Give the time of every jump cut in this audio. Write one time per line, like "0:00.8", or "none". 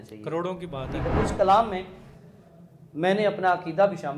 0:01.1